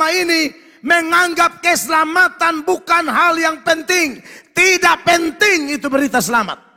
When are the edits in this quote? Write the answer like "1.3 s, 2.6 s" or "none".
none